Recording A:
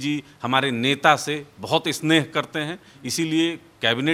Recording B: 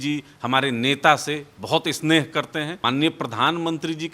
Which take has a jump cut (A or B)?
B